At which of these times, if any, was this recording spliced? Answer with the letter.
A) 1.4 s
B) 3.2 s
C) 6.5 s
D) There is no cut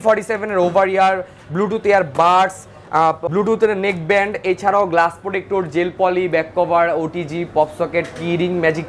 B